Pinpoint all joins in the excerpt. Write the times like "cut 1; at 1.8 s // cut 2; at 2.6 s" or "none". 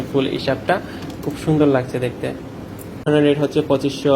cut 1; at 3.1 s